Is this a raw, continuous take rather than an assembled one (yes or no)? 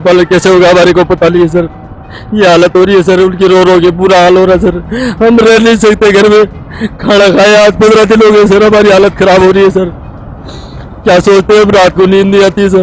yes